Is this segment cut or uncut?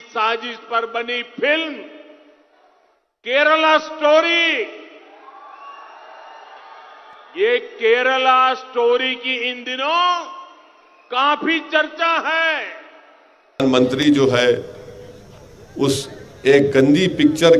cut